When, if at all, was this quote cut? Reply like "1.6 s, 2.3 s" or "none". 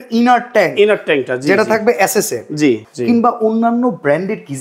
2.8 s